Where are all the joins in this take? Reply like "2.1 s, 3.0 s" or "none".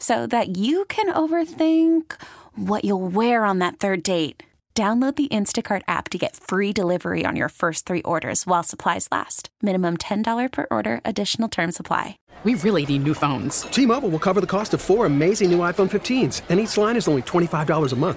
12.2 s